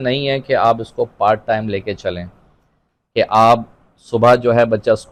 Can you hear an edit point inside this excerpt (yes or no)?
no